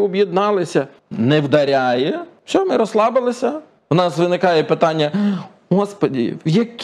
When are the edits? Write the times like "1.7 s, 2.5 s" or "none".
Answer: 1.0 s, 2.3 s, 3.7 s